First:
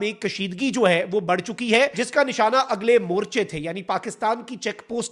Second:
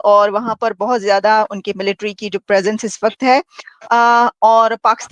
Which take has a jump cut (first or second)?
first